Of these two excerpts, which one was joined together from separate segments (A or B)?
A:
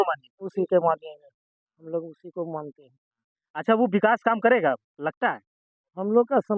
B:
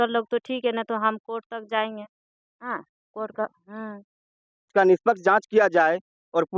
B